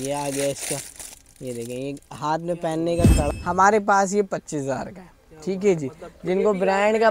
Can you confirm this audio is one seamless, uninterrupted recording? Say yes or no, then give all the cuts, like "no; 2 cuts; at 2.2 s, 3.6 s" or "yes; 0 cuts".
no; 1 cut; at 3.2 s